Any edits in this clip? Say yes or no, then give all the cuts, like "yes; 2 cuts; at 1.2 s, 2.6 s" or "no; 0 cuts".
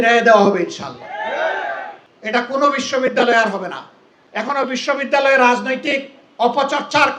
yes; 2 cuts; at 2.0 s, 4.5 s